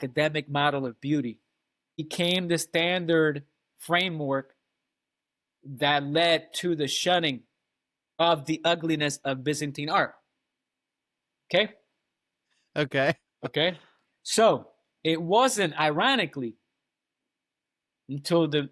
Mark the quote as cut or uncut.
cut